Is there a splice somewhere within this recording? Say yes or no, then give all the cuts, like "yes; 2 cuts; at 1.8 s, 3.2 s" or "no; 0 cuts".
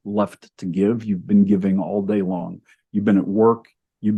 no; 0 cuts